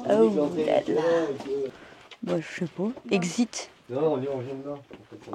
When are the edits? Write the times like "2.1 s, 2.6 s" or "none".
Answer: 1.7 s